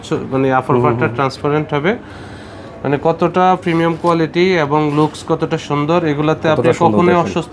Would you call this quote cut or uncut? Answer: uncut